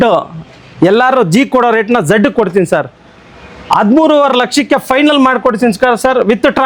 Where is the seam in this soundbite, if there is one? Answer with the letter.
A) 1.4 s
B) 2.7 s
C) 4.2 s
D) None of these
D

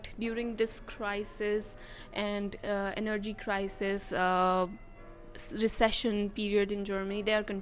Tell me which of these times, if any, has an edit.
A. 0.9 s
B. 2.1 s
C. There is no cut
C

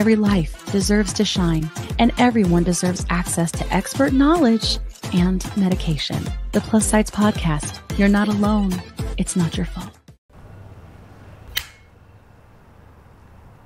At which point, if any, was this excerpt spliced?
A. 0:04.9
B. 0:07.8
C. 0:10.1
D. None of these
C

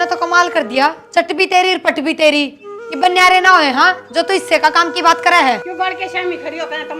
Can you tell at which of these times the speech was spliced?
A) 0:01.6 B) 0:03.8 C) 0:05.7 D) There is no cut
C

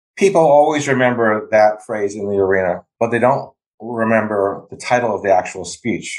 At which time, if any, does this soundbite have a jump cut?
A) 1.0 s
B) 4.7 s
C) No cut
C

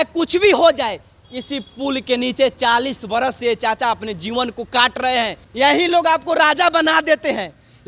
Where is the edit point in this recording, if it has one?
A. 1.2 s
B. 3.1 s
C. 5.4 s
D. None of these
C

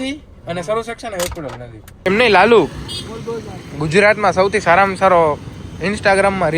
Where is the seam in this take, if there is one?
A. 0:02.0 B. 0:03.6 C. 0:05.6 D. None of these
A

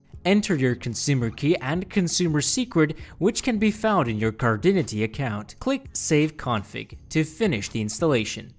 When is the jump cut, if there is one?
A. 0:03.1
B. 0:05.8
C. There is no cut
B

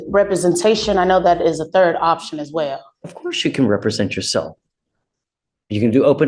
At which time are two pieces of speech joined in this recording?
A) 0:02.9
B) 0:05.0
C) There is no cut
C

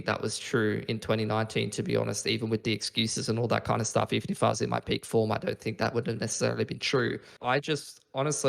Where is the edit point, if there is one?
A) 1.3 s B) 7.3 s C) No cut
B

